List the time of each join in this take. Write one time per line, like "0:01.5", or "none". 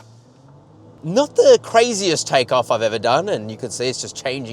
0:01.0